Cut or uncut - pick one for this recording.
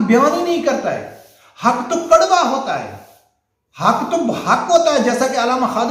uncut